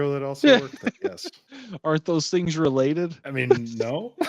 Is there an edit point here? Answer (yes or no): yes